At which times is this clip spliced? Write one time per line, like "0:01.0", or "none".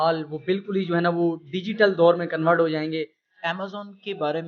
0:03.3